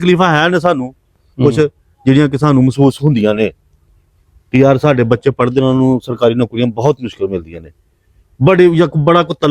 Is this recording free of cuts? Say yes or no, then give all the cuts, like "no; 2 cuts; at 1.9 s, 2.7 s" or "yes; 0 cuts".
yes; 0 cuts